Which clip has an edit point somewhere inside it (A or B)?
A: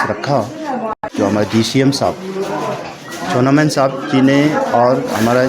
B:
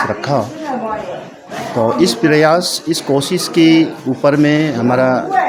A